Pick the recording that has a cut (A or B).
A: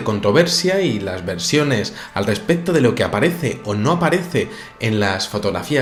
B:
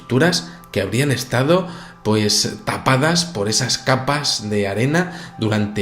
B